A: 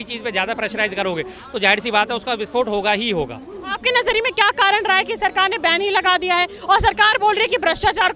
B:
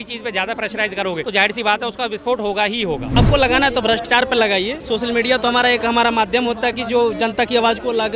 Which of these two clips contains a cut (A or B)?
B